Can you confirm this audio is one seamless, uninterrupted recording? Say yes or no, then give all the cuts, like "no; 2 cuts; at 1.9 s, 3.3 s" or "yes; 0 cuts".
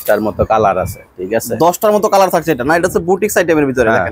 yes; 0 cuts